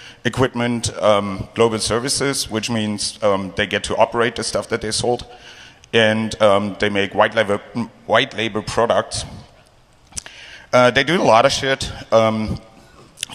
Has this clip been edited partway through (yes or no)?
no